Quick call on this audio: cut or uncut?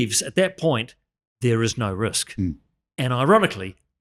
uncut